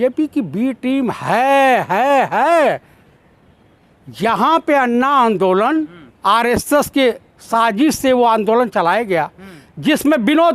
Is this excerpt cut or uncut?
uncut